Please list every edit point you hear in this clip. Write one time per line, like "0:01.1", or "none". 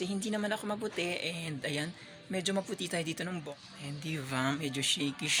0:03.4